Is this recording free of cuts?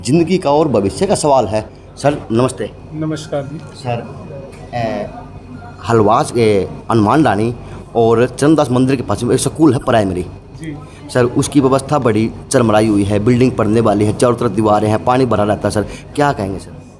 yes; 0 cuts

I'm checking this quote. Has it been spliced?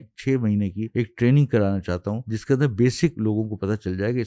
yes; 3 cuts; at 0.8 s, 2.3 s, 3.2 s

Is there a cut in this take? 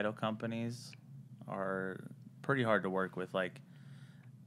no; 0 cuts

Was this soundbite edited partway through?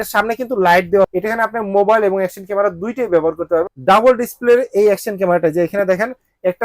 yes; 2 cuts; at 1.1 s, 3.7 s

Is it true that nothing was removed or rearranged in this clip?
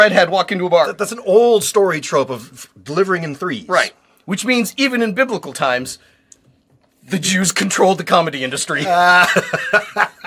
yes; 0 cuts

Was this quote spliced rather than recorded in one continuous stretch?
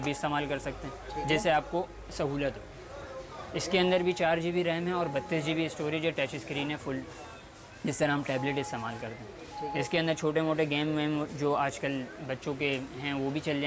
no; 0 cuts

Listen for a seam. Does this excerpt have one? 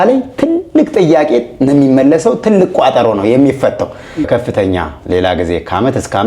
yes; 1 cut; at 4.3 s

